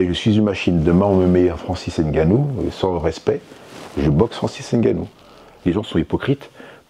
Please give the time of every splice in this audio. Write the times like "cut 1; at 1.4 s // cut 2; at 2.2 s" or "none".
cut 1; at 5.6 s